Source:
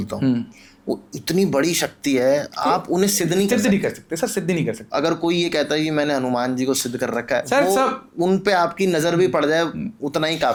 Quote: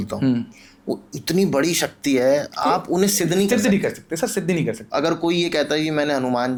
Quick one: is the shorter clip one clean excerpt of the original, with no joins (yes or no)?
yes